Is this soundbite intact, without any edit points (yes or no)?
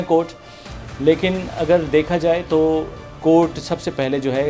yes